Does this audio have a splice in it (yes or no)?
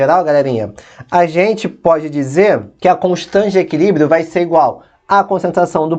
yes